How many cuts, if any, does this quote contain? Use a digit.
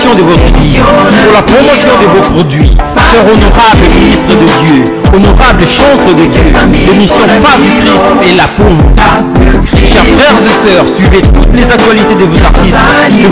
0